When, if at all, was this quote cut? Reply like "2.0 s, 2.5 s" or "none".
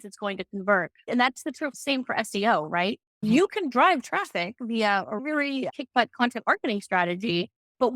1.1 s